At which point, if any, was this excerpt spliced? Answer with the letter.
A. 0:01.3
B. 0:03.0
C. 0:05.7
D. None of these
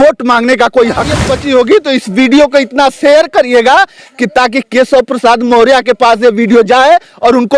A